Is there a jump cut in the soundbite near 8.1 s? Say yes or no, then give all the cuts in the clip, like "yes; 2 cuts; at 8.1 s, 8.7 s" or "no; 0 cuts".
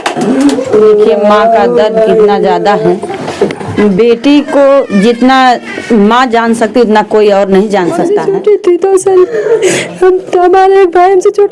yes; 1 cut; at 8.1 s